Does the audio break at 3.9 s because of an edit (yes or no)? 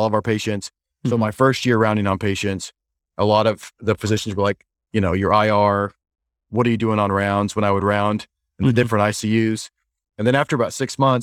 no